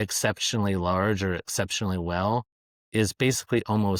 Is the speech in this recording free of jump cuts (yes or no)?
yes